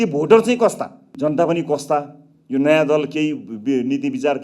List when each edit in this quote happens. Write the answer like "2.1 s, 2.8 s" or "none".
1.1 s